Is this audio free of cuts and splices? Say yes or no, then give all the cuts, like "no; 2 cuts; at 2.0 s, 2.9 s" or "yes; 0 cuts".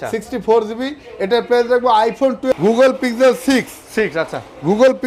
no; 1 cut; at 2.5 s